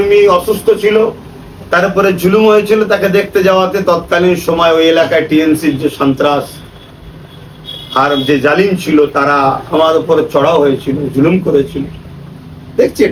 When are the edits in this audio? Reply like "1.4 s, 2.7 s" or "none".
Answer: none